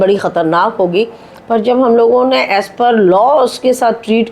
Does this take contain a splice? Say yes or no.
no